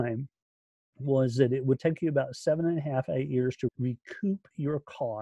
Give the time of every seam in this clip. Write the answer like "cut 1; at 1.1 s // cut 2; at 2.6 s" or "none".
cut 1; at 3.7 s